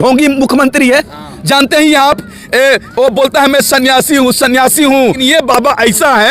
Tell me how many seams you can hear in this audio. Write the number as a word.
one